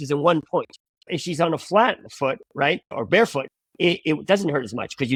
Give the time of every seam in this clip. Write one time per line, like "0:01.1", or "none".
none